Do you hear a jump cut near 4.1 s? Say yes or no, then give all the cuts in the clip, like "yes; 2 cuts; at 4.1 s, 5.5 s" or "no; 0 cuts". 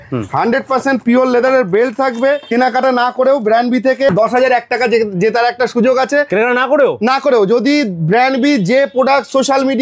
yes; 2 cuts; at 2.4 s, 4.1 s